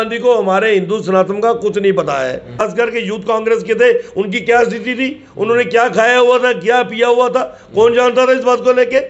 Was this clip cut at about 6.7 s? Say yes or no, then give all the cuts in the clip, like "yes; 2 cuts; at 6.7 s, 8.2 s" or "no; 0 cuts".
no; 1 cut; at 2.7 s